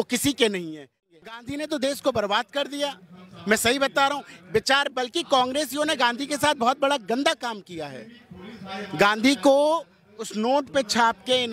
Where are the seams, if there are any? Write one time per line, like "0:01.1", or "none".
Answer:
0:01.0